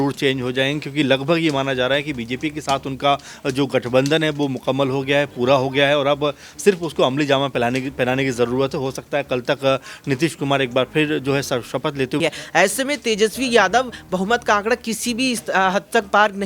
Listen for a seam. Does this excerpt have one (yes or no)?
yes